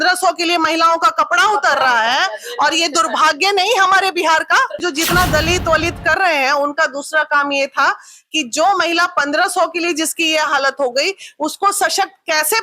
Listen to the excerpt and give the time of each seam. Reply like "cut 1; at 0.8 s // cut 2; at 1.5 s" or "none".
cut 1; at 4.8 s